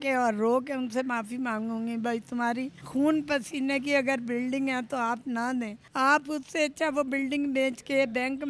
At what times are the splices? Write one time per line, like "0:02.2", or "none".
0:02.8
0:05.8